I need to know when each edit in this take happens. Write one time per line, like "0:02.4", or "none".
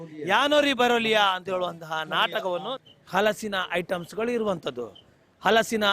0:02.8